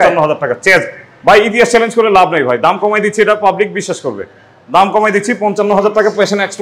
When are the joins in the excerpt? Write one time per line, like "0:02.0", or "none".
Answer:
none